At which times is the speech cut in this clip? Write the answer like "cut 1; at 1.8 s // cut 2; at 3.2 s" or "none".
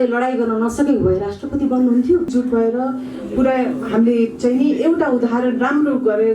cut 1; at 2.3 s